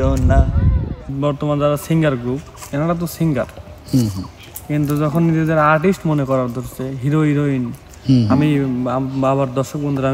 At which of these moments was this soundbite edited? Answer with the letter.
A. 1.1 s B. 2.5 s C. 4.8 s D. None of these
A